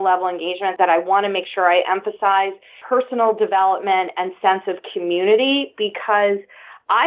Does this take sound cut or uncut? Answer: cut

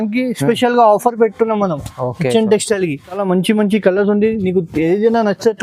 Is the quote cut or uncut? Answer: cut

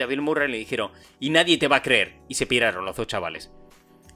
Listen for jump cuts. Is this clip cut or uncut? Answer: uncut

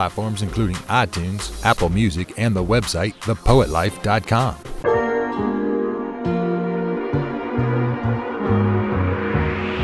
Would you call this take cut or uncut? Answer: cut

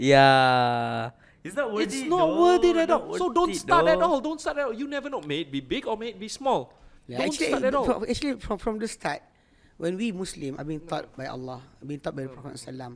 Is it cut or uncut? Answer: uncut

